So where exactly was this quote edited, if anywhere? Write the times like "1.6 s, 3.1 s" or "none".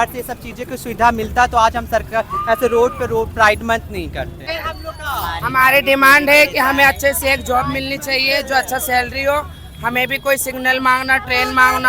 4.4 s